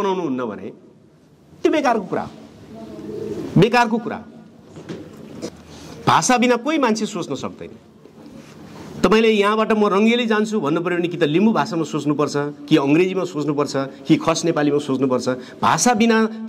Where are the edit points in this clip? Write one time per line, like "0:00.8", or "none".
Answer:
0:05.5